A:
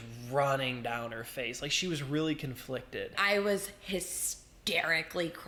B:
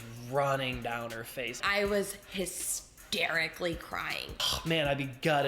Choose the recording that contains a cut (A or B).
B